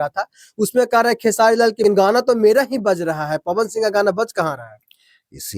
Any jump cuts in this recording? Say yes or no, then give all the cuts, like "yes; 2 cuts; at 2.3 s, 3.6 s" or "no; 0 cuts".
yes; 1 cut; at 1.8 s